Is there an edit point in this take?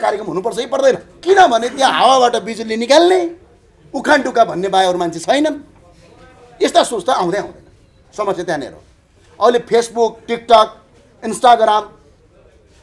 yes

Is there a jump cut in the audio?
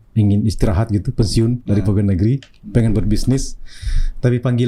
no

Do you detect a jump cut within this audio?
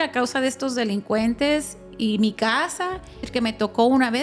yes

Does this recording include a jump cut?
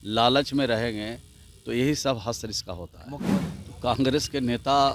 yes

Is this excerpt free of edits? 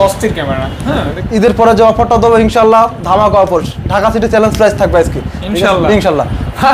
no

